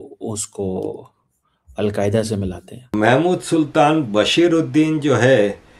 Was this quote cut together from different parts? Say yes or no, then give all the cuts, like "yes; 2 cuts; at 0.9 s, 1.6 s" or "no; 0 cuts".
yes; 1 cut; at 2.8 s